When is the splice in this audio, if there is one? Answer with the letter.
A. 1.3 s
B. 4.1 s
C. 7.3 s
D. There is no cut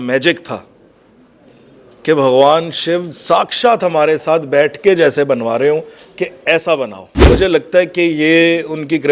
C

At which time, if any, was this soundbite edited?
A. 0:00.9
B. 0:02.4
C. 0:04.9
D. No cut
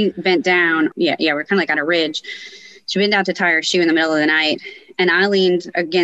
A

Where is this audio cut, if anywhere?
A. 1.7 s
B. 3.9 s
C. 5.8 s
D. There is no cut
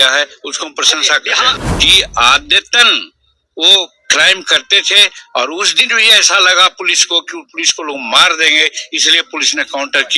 A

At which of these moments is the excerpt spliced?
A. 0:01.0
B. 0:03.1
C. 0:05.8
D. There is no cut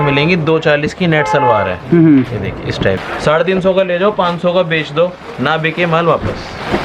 B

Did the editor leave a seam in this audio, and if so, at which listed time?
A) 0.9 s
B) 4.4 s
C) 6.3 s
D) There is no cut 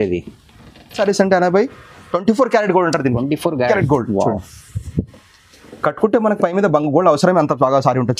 A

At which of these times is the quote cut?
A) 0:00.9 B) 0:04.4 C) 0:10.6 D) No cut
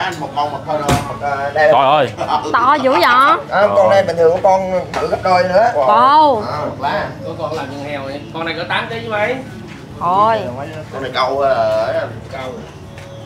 D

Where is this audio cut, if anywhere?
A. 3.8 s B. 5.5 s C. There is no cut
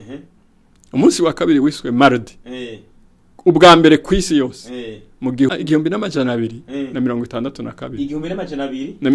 B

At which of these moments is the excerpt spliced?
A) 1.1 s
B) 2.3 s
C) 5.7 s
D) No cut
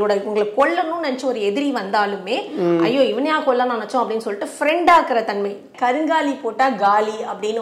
C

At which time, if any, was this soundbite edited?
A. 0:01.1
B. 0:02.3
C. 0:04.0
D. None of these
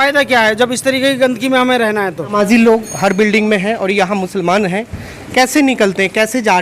B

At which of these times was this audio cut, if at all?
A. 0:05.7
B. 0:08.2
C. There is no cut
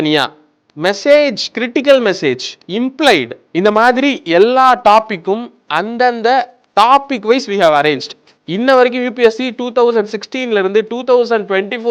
B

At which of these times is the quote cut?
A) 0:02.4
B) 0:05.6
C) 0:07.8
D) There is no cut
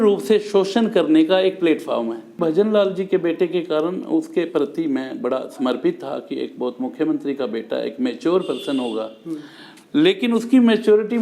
A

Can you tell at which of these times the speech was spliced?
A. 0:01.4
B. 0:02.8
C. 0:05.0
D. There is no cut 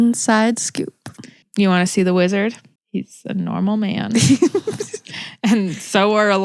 D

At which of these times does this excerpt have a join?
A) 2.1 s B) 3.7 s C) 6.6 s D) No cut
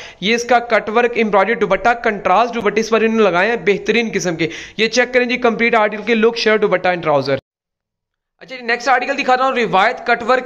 D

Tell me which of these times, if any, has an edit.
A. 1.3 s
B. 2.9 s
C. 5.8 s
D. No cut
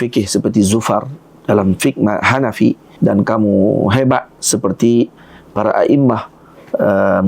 B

